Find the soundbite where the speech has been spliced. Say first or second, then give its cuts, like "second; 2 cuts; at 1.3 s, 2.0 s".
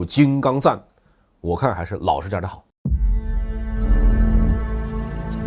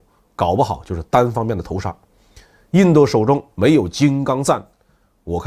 first; 1 cut; at 2.7 s